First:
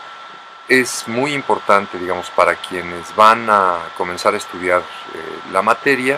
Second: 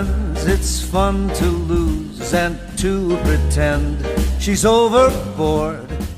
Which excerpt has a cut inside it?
second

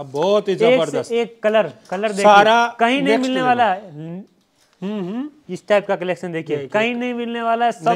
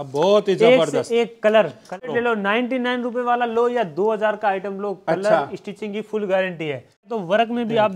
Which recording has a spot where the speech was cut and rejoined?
second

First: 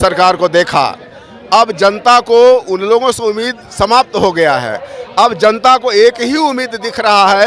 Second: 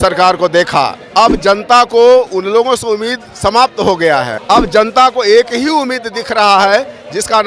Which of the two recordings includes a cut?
second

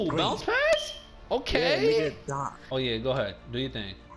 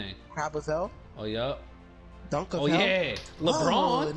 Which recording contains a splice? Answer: first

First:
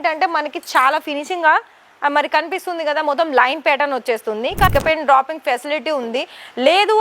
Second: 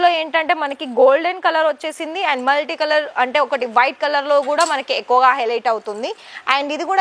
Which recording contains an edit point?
first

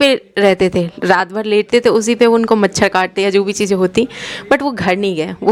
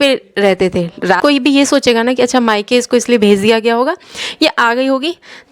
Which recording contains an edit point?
second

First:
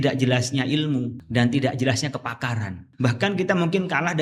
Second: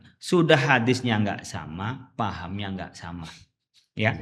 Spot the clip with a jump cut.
first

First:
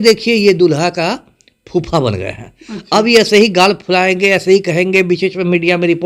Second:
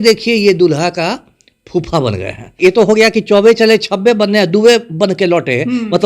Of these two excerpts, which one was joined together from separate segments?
second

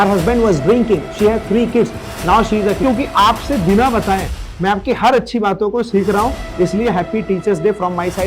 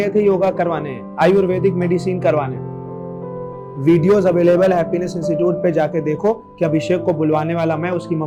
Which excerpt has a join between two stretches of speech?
first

